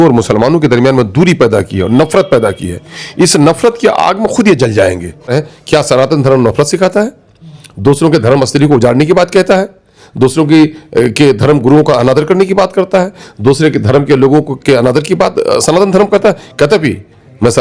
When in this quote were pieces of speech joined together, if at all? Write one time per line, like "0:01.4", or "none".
0:05.3

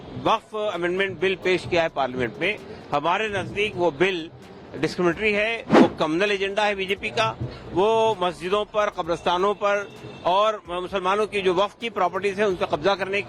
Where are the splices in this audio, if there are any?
none

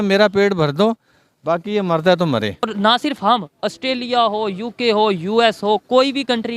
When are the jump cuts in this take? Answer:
0:02.6

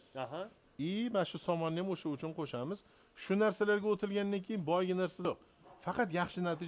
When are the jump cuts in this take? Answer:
0:05.3

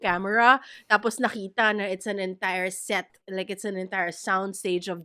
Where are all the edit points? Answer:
none

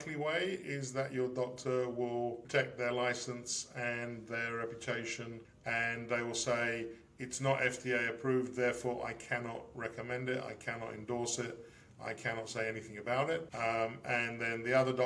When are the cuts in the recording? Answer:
0:02.4
0:05.5
0:13.5

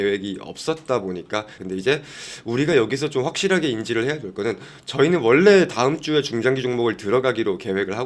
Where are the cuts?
0:01.5

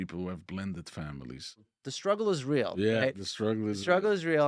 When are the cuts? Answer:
0:01.8

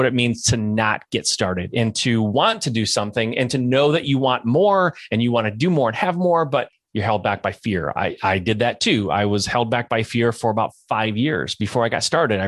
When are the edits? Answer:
0:06.8

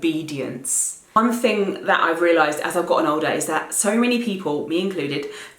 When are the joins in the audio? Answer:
0:01.2

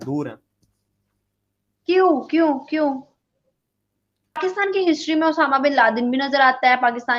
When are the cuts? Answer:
0:04.4

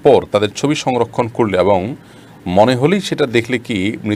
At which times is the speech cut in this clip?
none

